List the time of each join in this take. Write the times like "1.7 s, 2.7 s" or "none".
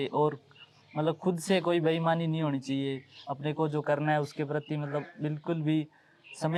none